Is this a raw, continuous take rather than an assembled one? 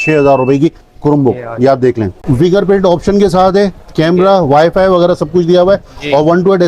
no; 1 cut; at 2.2 s

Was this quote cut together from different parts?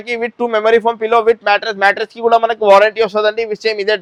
no; 0 cuts

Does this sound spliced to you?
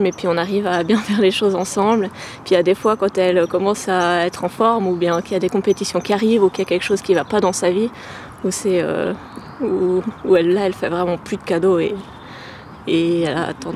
no; 0 cuts

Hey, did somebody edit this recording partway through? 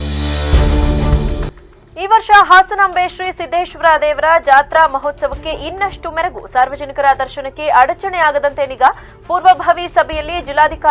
yes; 1 cut; at 1.5 s

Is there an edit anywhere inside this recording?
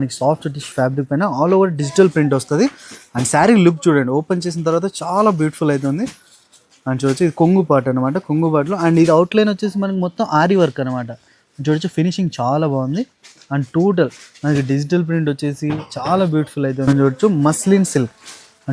yes; 1 cut; at 16.8 s

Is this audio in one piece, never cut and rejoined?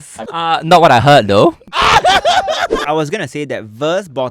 no; 1 cut; at 2.8 s

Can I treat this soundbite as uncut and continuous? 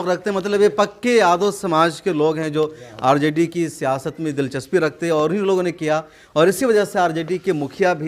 yes; 0 cuts

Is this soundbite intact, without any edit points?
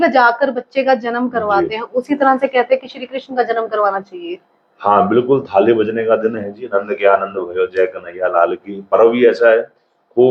yes; 0 cuts

